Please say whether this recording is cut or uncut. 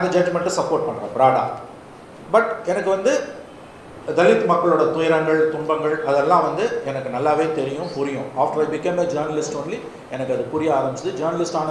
uncut